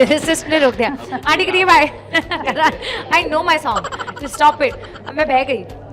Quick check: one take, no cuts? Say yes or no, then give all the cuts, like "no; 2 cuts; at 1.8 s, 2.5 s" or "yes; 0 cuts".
yes; 0 cuts